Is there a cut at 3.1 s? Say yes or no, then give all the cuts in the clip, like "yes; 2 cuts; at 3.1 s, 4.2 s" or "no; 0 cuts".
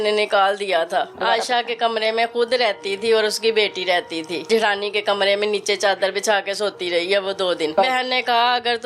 no; 3 cuts; at 1.1 s, 4.4 s, 7.7 s